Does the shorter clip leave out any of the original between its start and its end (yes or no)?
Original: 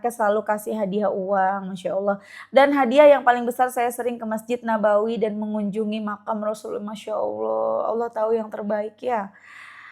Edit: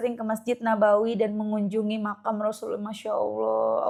no